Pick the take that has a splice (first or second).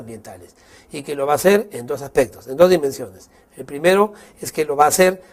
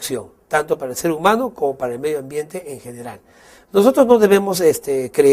second